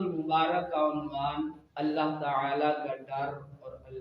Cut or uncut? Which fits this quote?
cut